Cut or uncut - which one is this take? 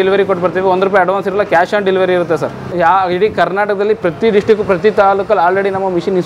uncut